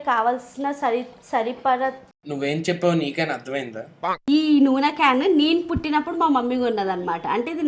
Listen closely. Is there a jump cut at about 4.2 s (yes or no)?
yes